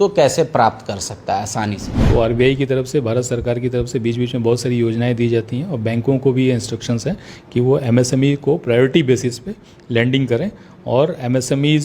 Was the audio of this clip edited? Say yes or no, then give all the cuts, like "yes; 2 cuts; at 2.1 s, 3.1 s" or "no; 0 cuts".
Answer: yes; 1 cut; at 1.9 s